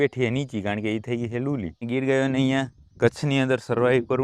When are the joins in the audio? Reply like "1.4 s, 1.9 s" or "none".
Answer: 1.8 s